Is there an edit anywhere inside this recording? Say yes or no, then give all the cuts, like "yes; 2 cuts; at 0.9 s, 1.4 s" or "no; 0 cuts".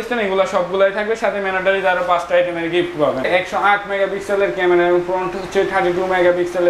yes; 1 cut; at 3.3 s